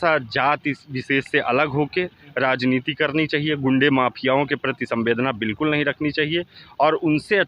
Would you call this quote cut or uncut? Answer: uncut